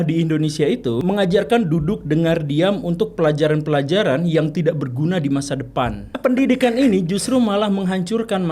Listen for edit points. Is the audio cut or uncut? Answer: cut